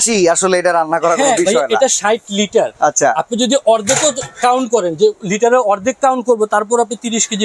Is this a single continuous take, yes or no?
yes